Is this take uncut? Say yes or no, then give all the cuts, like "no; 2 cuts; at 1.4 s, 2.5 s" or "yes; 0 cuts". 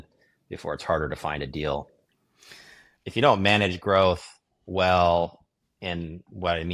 no; 1 cut; at 3.0 s